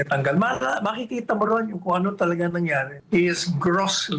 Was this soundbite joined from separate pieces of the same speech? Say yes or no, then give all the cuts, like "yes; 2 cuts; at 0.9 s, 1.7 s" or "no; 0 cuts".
yes; 1 cut; at 3.0 s